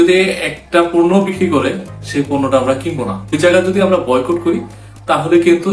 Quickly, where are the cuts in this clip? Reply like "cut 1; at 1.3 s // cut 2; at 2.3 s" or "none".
cut 1; at 3.3 s